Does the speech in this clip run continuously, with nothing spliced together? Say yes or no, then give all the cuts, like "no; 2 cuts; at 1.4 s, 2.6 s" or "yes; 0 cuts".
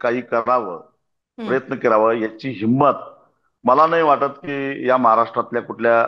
yes; 0 cuts